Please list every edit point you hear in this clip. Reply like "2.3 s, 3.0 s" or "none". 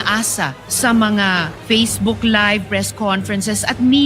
1.5 s